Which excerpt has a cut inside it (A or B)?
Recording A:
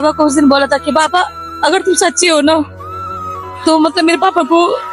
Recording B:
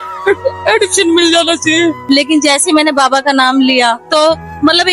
B